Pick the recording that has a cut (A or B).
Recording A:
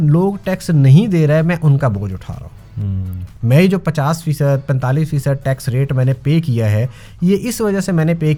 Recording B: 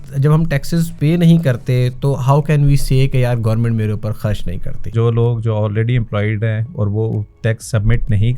B